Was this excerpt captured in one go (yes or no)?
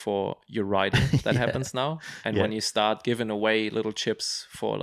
yes